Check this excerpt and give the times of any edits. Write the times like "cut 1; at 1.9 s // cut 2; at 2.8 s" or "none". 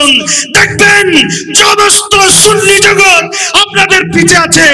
none